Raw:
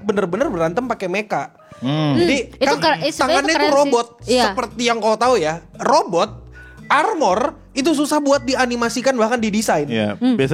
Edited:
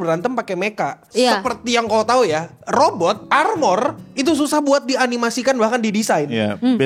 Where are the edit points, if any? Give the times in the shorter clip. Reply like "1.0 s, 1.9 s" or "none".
1.0 s, 3.2 s